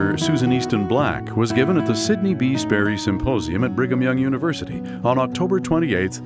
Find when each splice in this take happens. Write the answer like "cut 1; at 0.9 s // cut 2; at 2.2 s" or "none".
none

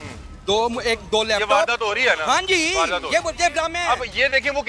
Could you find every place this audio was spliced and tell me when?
none

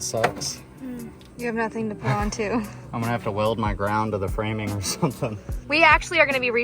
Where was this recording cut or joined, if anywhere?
cut 1; at 1.2 s // cut 2; at 2.8 s // cut 3; at 5.6 s

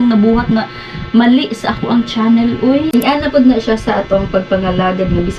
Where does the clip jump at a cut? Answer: cut 1; at 2.9 s

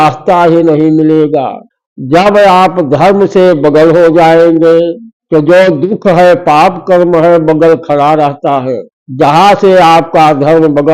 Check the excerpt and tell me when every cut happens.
none

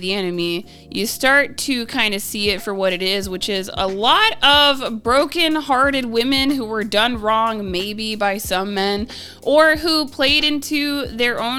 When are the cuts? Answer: none

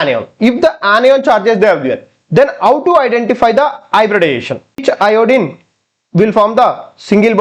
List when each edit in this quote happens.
cut 1; at 4.8 s

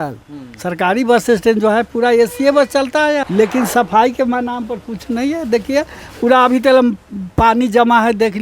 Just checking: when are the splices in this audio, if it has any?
cut 1; at 3.3 s

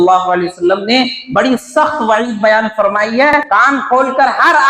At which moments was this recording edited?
cut 1; at 3.4 s

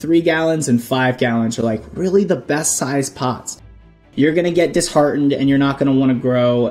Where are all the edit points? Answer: cut 1; at 3.9 s

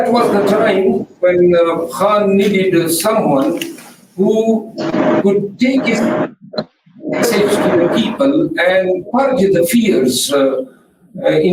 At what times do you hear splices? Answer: none

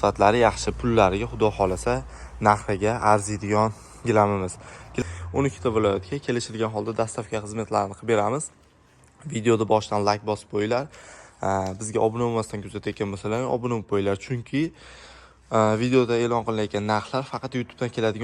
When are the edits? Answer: cut 1; at 5.0 s

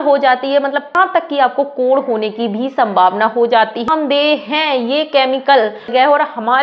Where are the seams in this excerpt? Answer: cut 1; at 0.9 s // cut 2; at 3.9 s // cut 3; at 5.9 s

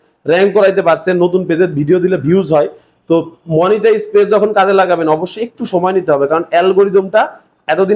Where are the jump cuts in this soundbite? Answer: none

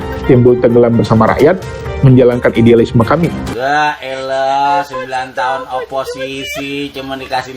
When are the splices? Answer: cut 1; at 3.5 s

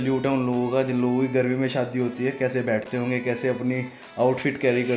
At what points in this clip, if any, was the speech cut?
none

